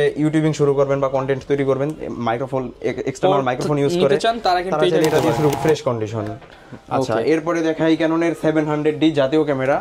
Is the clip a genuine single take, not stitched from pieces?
no; 1 cut; at 5.5 s

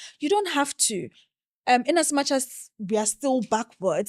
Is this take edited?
no; 0 cuts

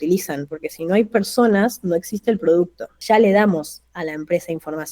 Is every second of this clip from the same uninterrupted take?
no; 1 cut; at 2.9 s

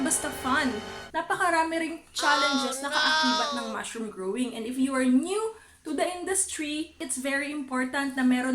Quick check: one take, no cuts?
no; 1 cut; at 7.0 s

